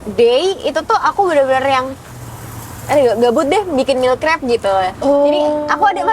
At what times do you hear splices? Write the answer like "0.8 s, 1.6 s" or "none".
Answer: none